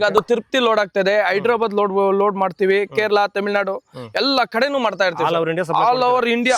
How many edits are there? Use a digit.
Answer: 0